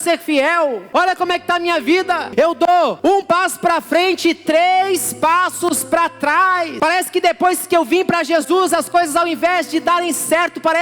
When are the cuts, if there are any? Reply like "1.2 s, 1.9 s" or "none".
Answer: 0.8 s, 2.3 s, 3.0 s, 6.7 s